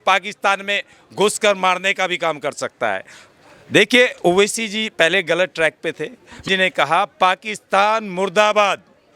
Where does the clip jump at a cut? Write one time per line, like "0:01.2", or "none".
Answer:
0:06.4